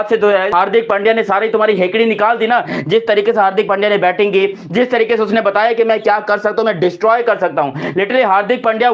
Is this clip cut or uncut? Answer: uncut